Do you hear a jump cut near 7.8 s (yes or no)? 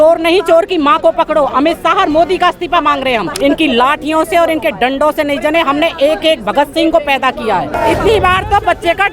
yes